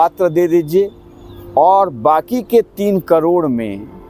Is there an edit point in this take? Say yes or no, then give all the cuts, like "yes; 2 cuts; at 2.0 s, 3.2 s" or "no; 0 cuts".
no; 0 cuts